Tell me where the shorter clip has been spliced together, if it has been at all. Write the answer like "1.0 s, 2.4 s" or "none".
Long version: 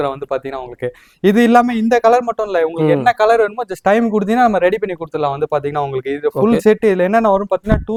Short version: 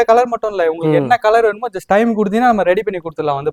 none